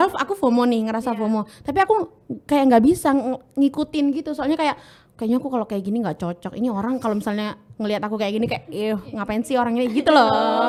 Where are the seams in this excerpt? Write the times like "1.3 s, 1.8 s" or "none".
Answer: none